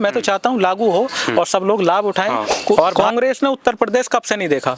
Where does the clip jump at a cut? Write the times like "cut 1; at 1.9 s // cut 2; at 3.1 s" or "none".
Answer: cut 1; at 2.9 s